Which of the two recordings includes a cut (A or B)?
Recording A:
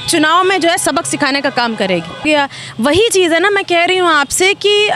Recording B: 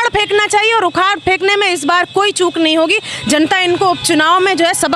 A